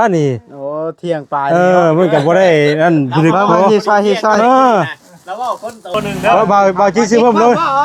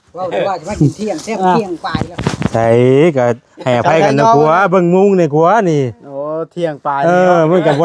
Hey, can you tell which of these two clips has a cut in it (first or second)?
first